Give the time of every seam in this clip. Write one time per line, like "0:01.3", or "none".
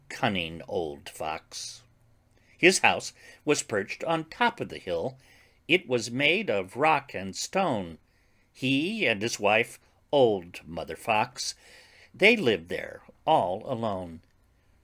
none